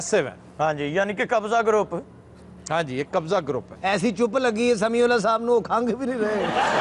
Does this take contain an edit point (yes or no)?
no